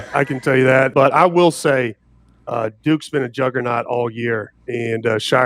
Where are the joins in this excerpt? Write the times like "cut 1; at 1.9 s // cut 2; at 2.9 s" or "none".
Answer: cut 1; at 0.9 s